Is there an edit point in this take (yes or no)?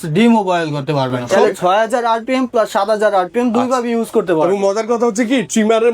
yes